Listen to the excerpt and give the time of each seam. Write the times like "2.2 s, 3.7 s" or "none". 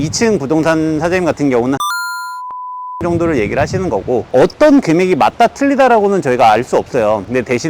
4.3 s

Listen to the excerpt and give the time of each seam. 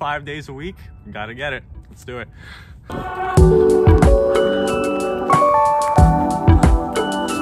none

